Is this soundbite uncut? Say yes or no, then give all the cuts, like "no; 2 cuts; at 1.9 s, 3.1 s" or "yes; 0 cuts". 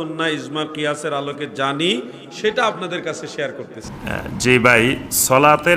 no; 1 cut; at 3.8 s